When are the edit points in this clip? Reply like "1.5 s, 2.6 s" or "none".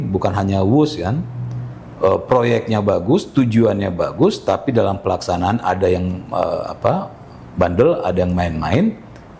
none